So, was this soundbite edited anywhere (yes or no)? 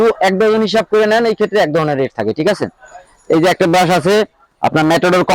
no